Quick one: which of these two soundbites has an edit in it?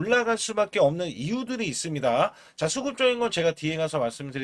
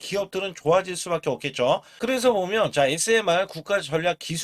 second; 1 cut; at 1.9 s

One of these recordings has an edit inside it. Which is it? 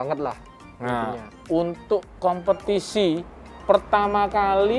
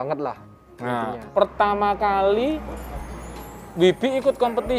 second; 1 cut; at 1.2 s

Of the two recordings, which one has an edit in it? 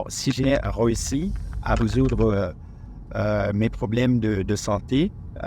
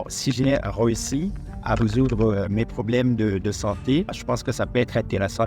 second; 2 cuts; at 2.5 s, 4.2 s

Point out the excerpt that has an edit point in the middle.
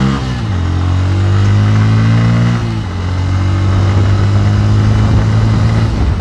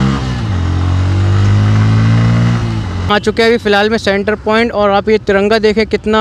second; 1 cut; at 3.1 s

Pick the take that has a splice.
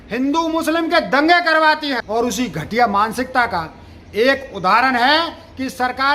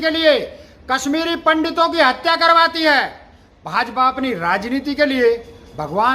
first; 1 cut; at 2.0 s

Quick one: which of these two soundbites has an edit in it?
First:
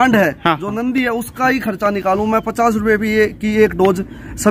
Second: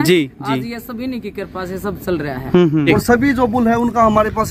second; 1 cut; at 2.9 s

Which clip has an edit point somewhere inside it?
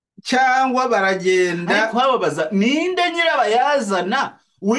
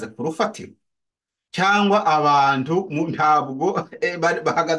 first; 1 cut; at 1.9 s

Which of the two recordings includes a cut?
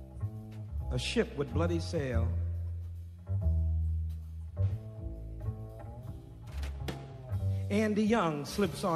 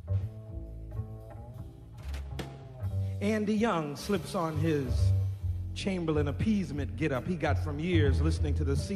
second; 1 cut; at 7.1 s

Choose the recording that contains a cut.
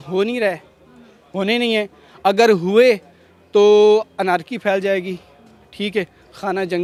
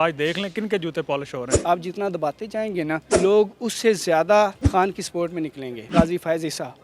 second; 4 cuts; at 1.5 s, 3.1 s, 4.6 s, 5.9 s

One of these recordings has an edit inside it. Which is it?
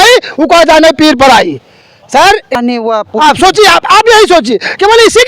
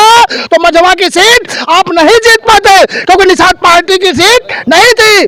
first; 1 cut; at 2.5 s

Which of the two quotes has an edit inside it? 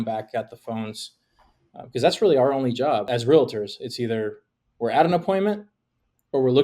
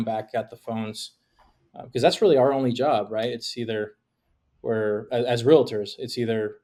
first; 1 cut; at 3.1 s

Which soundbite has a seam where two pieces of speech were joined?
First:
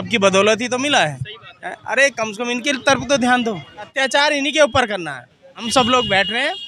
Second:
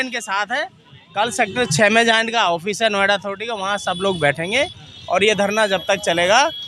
first; 2 cuts; at 3.8 s, 5.6 s

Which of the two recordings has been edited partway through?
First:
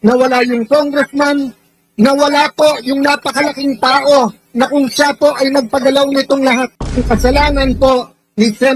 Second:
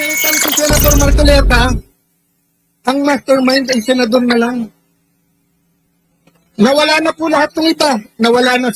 first; 1 cut; at 6.8 s

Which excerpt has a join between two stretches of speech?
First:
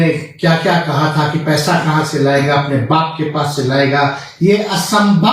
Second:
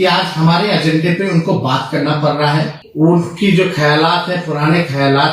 second; 1 cut; at 2.8 s

